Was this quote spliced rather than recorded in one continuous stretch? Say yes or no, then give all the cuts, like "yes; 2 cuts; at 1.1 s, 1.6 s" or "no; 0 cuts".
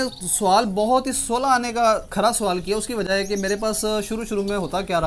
no; 0 cuts